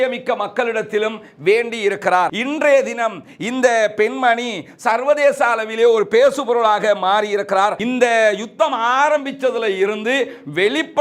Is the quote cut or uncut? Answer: cut